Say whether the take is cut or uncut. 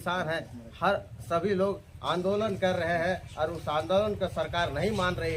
uncut